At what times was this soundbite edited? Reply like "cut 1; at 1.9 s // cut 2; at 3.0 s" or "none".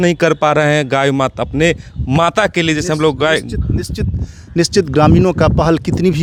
none